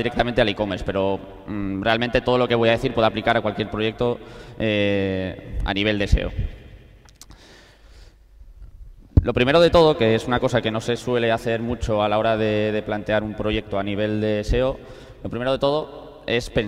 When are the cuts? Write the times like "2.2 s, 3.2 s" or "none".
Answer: 2.2 s

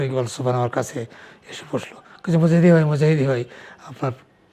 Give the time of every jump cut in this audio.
none

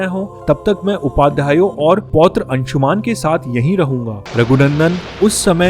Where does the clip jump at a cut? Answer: 4.2 s

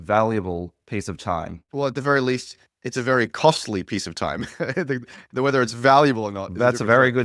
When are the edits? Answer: none

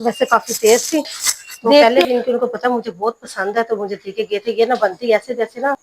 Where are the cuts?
1.8 s

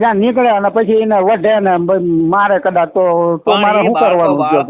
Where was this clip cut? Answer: none

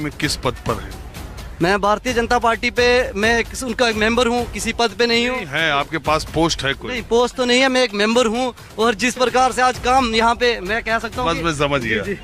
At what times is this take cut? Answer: none

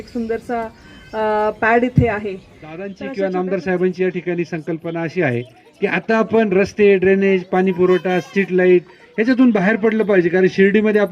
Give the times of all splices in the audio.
3.0 s

